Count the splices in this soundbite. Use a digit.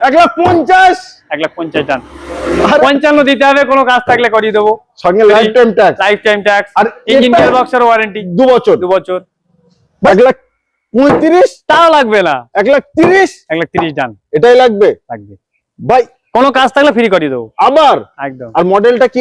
2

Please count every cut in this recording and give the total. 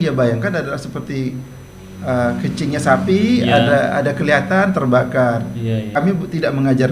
1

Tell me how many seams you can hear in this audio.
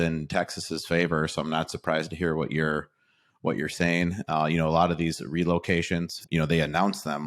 1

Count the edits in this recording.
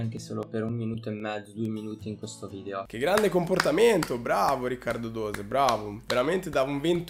1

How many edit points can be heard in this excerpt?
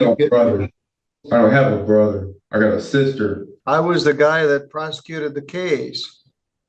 1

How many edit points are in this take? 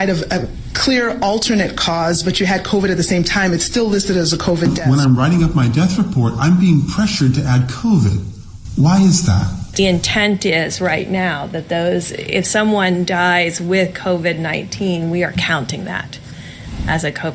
2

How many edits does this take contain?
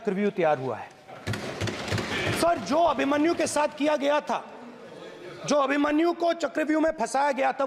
1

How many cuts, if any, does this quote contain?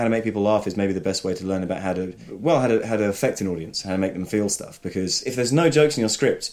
2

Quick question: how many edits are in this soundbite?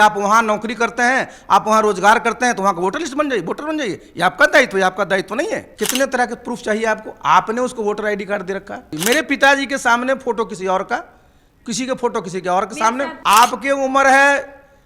3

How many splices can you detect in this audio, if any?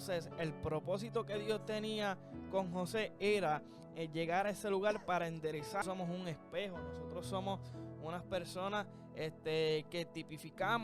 1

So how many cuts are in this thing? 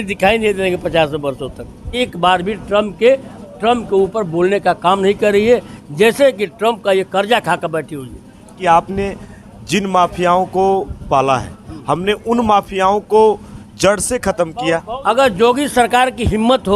3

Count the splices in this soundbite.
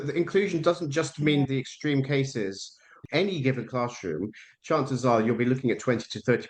2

